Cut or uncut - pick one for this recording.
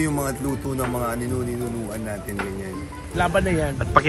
cut